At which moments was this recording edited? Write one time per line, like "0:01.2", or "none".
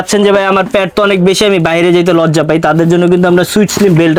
none